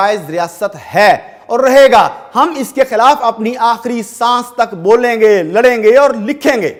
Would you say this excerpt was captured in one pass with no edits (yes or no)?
yes